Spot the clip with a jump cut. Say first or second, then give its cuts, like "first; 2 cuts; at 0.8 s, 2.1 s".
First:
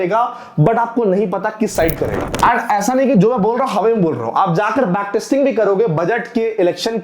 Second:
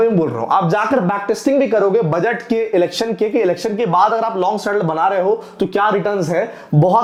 first; 1 cut; at 2.3 s